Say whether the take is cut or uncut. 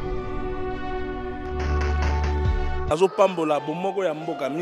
cut